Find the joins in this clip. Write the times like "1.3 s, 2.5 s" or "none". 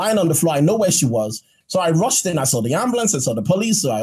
1.5 s